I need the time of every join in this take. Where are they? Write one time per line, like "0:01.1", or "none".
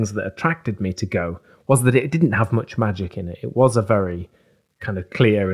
none